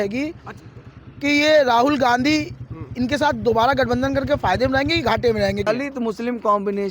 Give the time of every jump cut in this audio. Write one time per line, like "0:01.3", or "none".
0:05.7